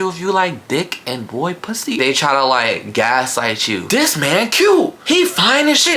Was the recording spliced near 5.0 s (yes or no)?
yes